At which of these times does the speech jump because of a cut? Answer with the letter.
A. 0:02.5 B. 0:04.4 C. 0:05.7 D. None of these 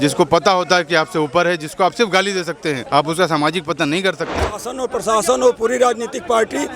B